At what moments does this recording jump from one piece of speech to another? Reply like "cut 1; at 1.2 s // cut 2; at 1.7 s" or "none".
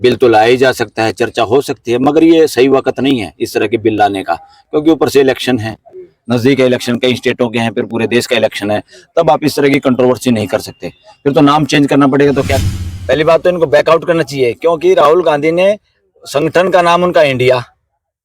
cut 1; at 12.5 s